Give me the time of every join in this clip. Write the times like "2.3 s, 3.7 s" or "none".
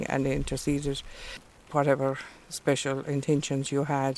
1.5 s